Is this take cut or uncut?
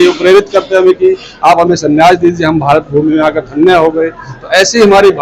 uncut